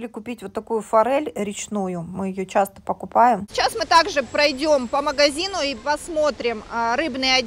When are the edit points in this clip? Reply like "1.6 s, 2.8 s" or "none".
3.5 s

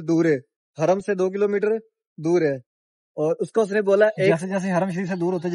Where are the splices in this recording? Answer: 4.4 s

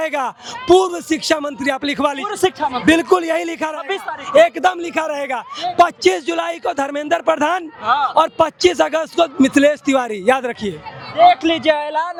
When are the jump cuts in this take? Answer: none

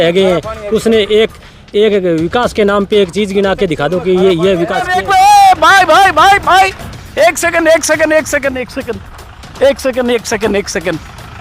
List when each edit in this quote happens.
4.8 s

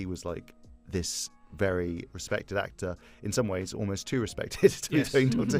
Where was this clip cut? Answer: none

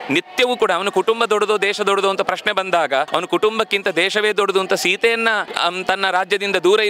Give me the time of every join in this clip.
none

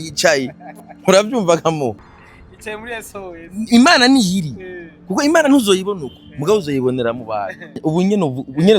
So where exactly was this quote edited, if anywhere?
7.8 s

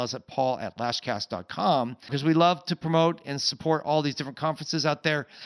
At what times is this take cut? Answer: 2.1 s

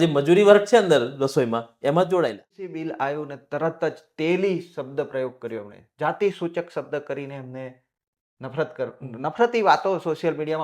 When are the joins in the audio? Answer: 2.8 s

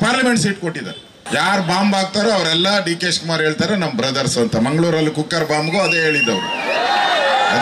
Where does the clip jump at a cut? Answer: 1.2 s

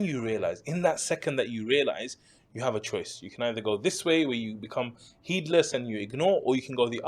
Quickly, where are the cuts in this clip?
none

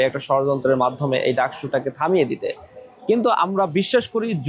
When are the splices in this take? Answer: none

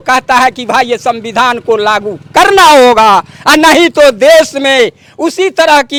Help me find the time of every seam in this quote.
none

